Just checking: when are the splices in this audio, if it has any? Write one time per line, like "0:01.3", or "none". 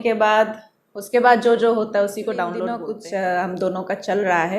0:02.8

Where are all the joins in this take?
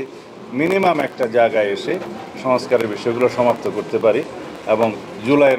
none

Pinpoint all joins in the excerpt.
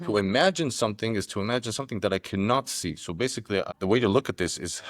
0:03.7

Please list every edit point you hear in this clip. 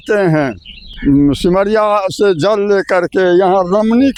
none

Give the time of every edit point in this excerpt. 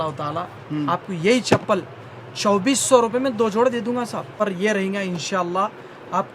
0:04.4

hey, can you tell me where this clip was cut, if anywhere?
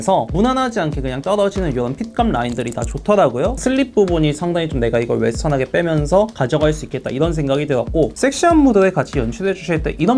0:03.6
0:08.1

